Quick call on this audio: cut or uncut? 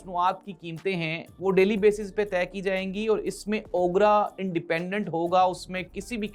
uncut